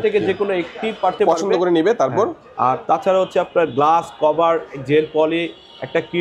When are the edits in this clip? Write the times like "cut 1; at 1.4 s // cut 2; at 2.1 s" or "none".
cut 1; at 1.2 s